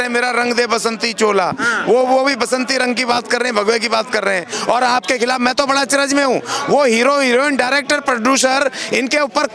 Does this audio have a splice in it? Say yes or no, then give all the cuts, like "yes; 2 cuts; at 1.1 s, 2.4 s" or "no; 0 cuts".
yes; 1 cut; at 4.5 s